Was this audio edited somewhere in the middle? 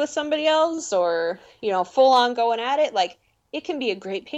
no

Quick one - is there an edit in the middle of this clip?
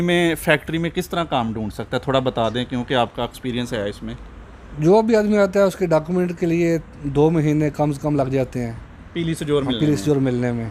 no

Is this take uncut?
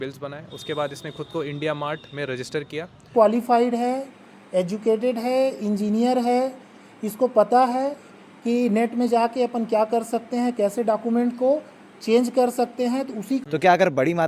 no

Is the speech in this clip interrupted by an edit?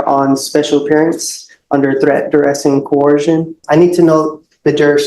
yes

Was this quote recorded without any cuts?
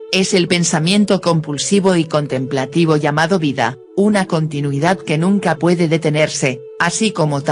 yes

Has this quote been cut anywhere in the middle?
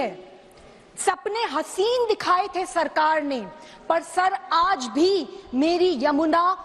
no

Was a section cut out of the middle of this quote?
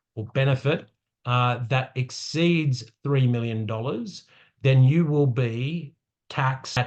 no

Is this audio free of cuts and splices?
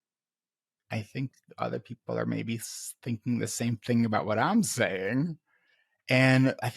yes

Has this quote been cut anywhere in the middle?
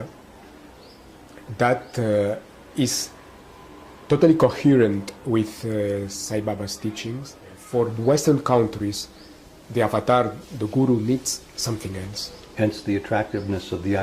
yes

